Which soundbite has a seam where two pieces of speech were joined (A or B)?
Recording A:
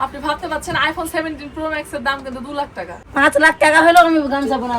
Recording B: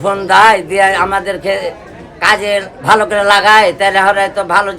A